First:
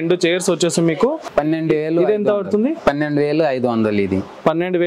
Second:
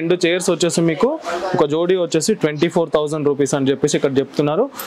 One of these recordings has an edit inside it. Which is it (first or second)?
first